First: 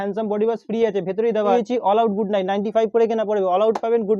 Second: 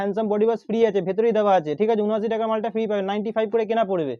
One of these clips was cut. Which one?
first; 1 cut; at 1.5 s

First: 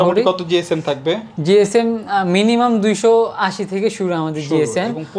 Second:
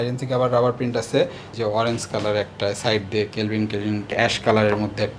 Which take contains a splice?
second; 2 cuts; at 1.4 s, 4.1 s

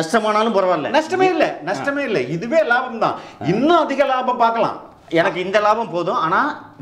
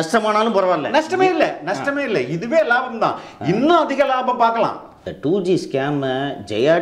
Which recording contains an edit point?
second; 1 cut; at 4.9 s

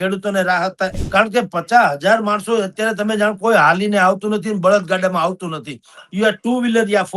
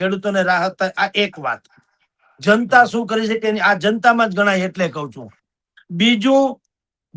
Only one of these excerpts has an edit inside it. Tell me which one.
first; 1 cut; at 1.0 s

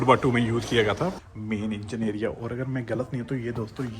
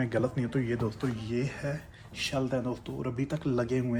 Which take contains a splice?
first; 1 cut; at 1.2 s

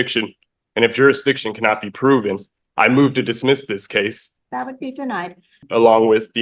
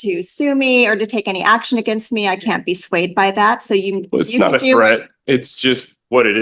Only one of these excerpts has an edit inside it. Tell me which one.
first; 2 cuts; at 4.3 s, 5.6 s

